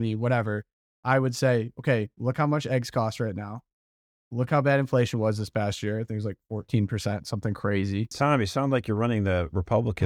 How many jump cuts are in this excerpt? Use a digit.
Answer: 1